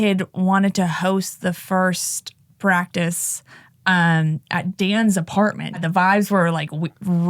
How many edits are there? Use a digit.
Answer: 1